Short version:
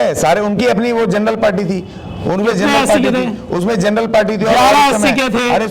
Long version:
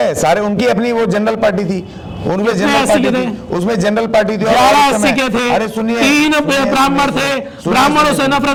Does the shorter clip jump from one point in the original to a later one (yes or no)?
no